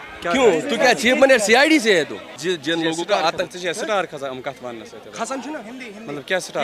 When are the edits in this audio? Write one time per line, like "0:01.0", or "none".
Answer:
0:02.2